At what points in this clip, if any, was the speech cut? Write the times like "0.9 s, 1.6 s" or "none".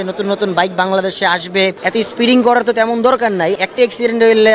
1.8 s, 3.6 s